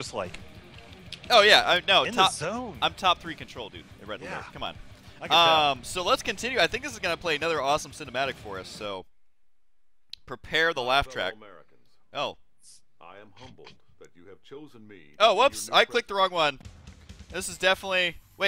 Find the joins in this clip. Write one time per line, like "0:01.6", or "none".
0:05.3